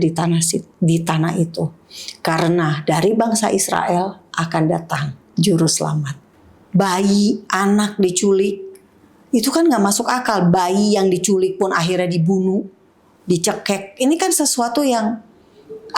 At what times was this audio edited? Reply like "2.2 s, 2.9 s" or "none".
6.2 s